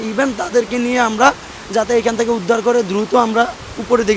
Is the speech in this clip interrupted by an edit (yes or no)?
no